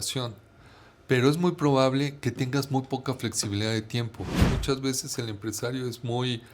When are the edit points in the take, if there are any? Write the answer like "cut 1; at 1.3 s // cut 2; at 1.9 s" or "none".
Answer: cut 1; at 4.4 s